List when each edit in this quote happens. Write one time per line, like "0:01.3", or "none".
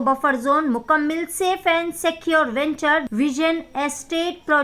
0:03.1